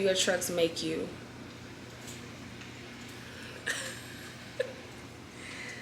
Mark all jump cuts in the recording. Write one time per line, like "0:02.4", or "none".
none